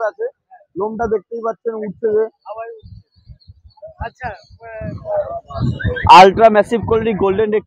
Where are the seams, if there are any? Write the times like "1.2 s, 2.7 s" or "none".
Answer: 4.8 s